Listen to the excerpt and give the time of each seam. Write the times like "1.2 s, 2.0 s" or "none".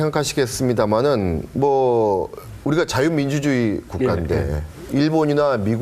3.8 s

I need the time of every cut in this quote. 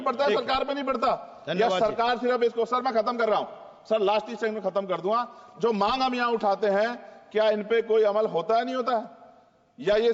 none

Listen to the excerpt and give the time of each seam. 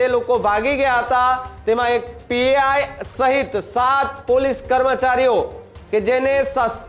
none

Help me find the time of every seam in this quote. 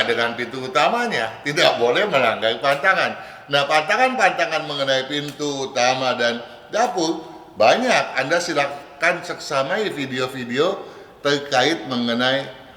none

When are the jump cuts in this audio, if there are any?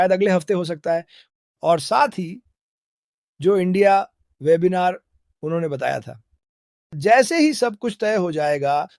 1.2 s

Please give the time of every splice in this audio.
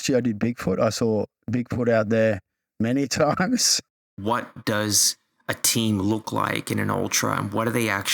4.2 s

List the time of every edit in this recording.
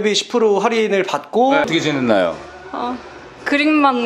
1.7 s

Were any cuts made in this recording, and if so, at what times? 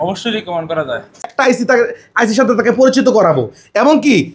1.2 s

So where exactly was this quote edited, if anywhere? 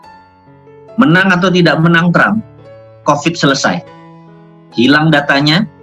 1.0 s

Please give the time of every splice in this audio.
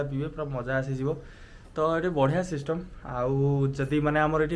none

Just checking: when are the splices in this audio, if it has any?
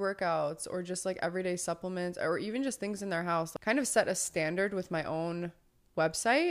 3.5 s

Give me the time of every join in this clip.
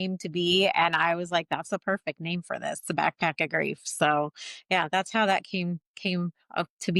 none

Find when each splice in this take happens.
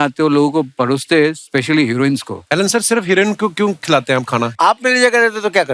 2.4 s, 4.5 s

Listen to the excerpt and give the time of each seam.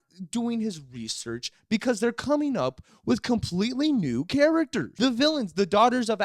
4.9 s

